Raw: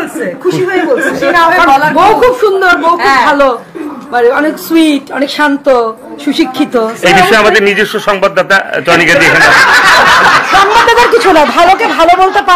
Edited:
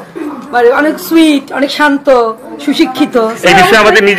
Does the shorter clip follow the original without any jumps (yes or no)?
yes